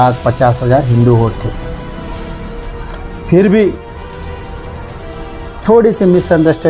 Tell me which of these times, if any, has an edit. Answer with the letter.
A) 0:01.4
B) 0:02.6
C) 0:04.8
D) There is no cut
D